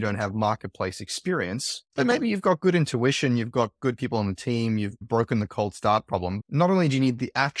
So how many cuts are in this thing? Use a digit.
1